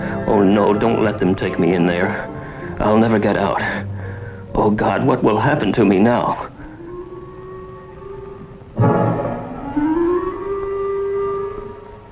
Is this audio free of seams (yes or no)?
no